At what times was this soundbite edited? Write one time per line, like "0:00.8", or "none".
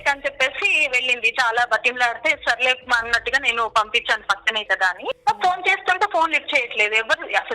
0:05.2